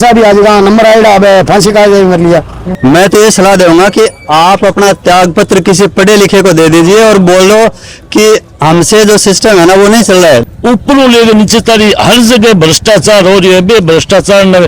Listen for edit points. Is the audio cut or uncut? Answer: cut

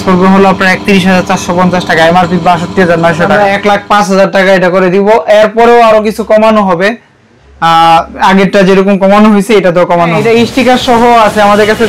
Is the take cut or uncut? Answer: cut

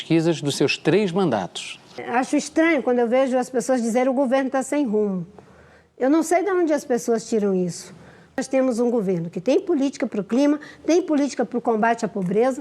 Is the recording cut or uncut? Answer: cut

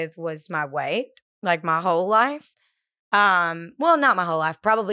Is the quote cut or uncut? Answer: uncut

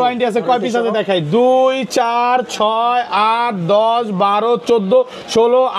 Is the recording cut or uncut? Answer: uncut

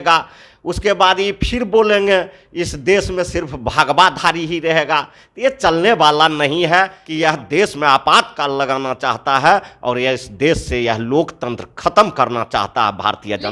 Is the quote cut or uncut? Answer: cut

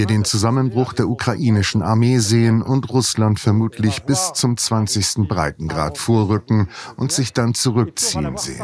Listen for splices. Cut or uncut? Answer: uncut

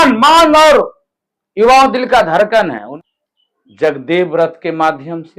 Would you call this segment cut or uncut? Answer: cut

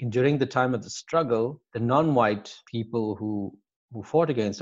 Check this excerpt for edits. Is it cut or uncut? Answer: cut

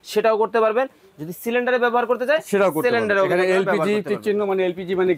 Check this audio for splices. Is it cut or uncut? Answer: uncut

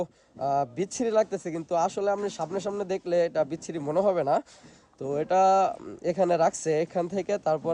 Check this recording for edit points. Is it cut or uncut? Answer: uncut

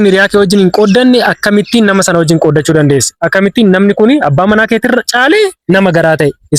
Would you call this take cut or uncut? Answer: uncut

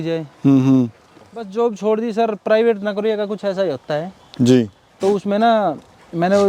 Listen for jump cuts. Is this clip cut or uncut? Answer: cut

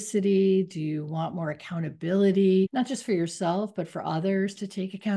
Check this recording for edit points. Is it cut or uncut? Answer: cut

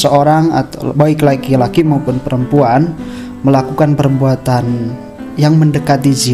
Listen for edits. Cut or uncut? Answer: uncut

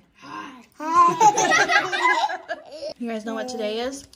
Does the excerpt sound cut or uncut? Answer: cut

